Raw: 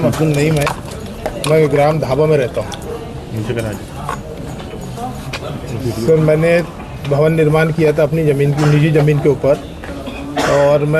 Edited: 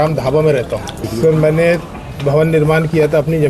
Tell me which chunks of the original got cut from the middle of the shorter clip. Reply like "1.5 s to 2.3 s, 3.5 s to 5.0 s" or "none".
2.8 s to 5.8 s